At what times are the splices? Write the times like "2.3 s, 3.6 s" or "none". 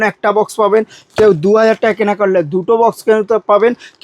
none

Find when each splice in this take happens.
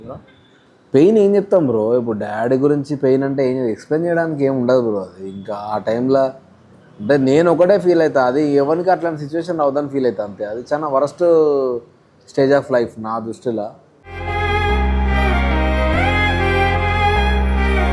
none

